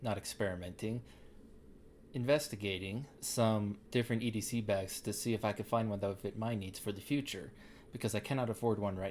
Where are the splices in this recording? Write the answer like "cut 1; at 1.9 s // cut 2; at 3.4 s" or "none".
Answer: cut 1; at 3.2 s // cut 2; at 3.8 s